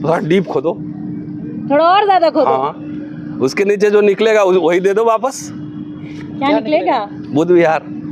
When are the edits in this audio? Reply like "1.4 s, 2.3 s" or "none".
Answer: none